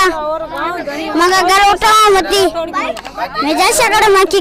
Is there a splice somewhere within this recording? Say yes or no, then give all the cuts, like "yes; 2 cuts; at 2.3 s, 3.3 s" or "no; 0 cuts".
no; 0 cuts